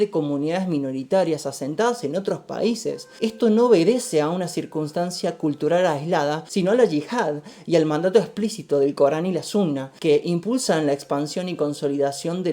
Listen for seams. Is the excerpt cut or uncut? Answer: cut